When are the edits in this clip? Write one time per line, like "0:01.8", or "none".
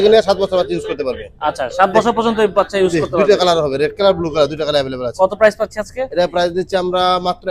none